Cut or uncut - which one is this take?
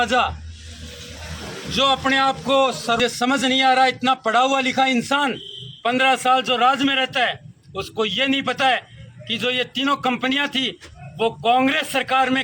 cut